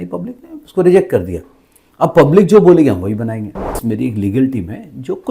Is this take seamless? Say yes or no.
no